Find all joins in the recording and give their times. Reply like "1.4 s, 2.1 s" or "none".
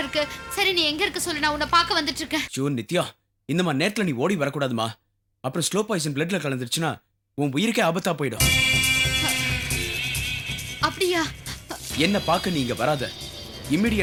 none